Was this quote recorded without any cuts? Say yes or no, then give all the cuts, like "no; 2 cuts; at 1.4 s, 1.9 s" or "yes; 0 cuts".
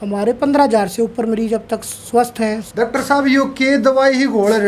no; 1 cut; at 2.6 s